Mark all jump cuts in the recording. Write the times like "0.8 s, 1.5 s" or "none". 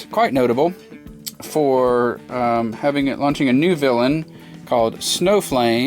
none